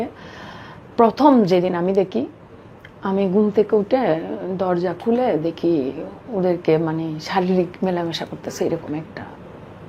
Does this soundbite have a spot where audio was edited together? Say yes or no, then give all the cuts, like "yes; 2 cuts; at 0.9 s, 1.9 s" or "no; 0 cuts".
no; 0 cuts